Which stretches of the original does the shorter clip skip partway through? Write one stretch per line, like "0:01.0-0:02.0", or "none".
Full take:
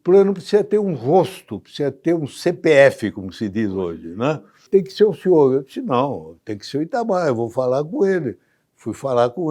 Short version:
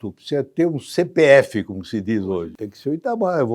0:04.0-0:06.4